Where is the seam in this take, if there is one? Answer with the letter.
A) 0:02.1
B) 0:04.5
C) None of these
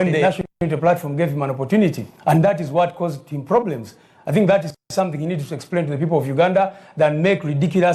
A